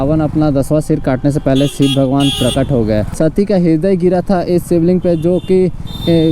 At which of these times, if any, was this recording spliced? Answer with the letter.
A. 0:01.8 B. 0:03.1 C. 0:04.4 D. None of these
B